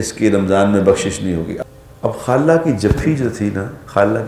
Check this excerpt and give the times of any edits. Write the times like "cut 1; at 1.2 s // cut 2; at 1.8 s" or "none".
cut 1; at 1.5 s